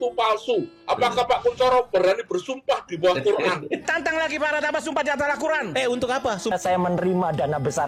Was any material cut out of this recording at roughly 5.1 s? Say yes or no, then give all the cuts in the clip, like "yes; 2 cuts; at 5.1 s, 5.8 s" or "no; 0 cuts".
no; 2 cuts; at 3.8 s, 6.5 s